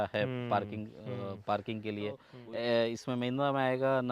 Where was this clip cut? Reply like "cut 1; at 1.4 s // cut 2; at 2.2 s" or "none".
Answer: cut 1; at 2.3 s